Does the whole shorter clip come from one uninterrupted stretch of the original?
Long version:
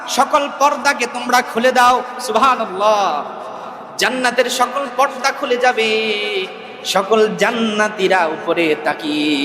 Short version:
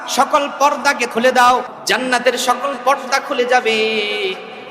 no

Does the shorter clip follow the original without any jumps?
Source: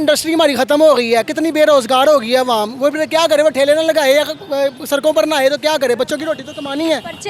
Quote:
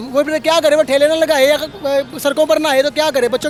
yes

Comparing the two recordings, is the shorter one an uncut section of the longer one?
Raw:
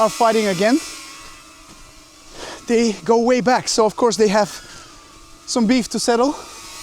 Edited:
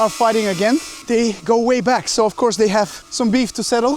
no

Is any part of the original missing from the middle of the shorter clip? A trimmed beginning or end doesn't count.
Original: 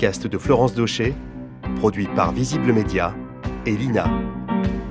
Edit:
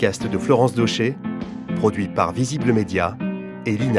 no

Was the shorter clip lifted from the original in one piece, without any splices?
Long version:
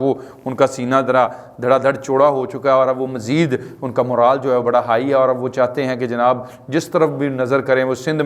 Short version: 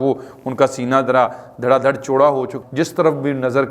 no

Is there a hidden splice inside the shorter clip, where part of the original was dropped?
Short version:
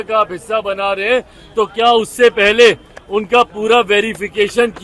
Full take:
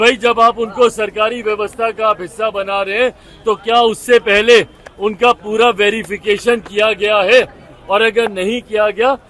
no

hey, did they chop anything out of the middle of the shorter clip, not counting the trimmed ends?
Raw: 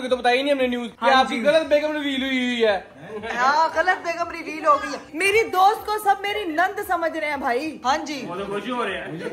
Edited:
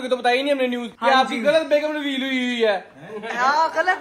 no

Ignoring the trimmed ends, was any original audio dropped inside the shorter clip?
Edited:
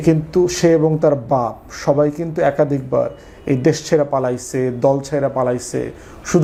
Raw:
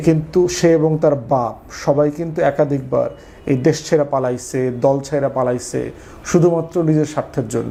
no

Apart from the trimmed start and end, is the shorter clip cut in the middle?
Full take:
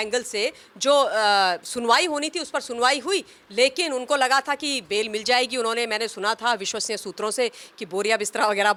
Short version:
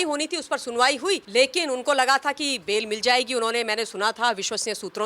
yes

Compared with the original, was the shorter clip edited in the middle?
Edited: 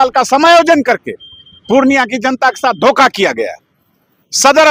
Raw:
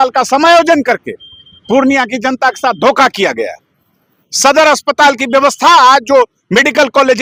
no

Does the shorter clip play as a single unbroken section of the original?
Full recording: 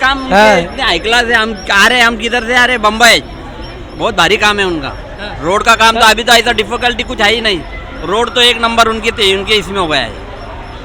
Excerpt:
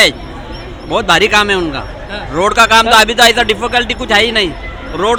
yes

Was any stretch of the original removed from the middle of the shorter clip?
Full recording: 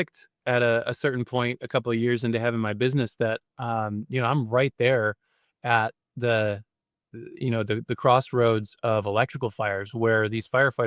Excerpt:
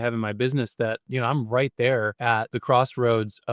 yes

